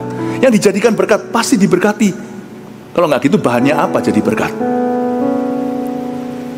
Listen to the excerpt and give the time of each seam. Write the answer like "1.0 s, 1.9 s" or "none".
none